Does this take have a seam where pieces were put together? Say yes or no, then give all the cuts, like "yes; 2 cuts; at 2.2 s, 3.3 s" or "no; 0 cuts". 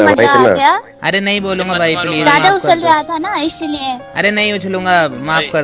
no; 0 cuts